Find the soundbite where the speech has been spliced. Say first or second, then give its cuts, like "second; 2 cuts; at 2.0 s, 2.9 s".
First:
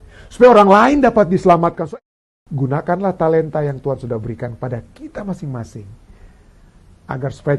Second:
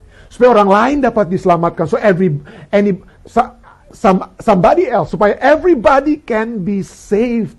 first; 1 cut; at 1.8 s